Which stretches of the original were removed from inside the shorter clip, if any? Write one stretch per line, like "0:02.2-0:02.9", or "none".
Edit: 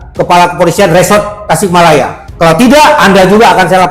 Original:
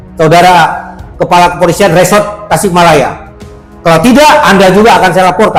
0:03.2-0:03.7